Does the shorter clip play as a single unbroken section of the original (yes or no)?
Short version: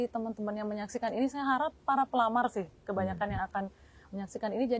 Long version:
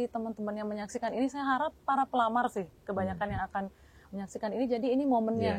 yes